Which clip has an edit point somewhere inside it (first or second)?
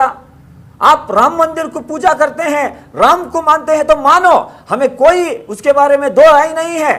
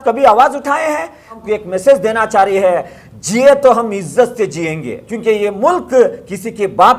second